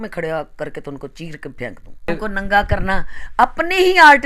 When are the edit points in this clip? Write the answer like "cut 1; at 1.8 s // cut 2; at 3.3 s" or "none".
cut 1; at 2.1 s